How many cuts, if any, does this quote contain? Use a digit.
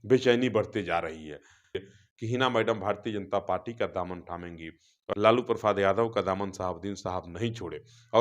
2